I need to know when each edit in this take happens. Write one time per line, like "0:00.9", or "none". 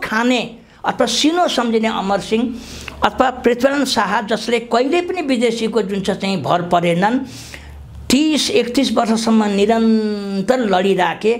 none